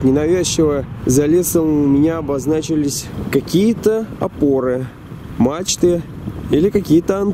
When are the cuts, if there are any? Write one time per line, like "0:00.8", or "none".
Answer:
0:00.9
0:03.1